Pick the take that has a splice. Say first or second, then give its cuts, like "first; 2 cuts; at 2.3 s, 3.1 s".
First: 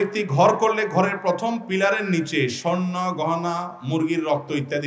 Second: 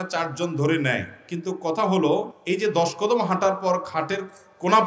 second; 1 cut; at 2.3 s